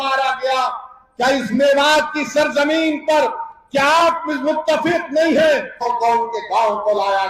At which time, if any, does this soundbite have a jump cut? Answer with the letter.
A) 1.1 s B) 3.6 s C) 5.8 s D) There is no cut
C